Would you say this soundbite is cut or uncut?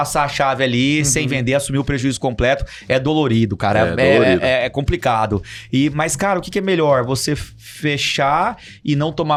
uncut